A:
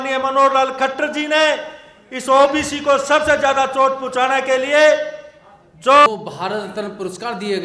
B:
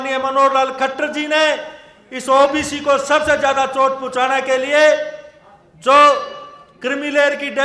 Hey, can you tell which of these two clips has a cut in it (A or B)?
A